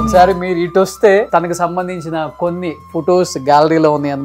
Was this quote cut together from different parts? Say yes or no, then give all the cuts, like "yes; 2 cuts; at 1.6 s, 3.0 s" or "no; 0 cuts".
yes; 1 cut; at 1.3 s